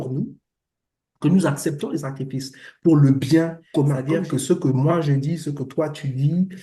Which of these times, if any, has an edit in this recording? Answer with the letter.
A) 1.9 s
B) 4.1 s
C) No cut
B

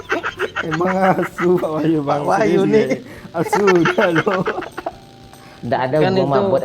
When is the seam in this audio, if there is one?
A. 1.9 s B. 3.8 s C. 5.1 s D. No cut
D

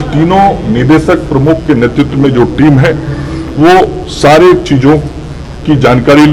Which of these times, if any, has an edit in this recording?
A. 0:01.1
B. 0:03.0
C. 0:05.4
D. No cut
D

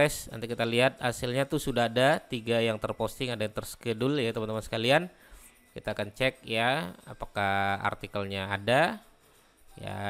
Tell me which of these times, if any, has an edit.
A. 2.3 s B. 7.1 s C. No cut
C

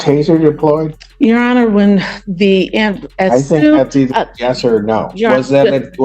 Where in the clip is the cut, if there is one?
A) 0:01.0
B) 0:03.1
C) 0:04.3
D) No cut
A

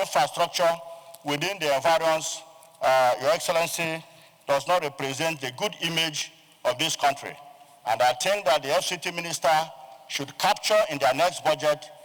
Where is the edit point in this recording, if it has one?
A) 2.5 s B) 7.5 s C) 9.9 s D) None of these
D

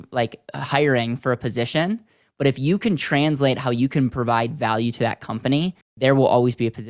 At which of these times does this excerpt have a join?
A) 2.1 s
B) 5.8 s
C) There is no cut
B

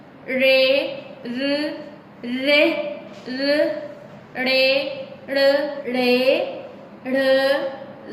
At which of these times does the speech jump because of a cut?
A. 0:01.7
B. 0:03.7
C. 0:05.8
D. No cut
C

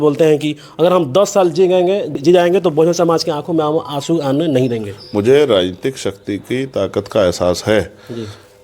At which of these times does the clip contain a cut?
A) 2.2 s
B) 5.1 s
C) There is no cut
A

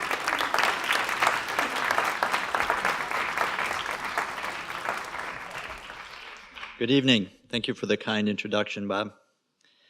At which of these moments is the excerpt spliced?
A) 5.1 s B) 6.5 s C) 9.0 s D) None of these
A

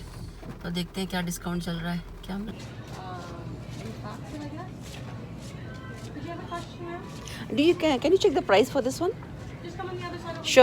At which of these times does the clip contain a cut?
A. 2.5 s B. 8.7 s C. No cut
A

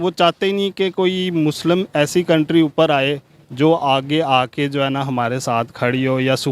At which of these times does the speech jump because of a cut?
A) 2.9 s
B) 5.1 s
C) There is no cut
C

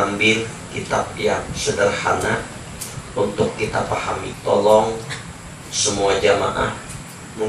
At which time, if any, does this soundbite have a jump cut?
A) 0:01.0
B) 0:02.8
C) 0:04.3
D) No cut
C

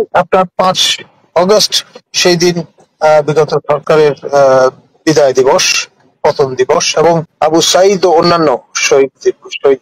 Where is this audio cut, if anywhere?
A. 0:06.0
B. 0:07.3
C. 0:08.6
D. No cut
B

